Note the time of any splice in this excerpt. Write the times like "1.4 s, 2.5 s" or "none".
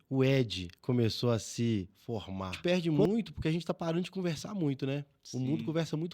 2.6 s